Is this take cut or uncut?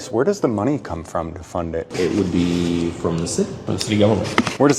cut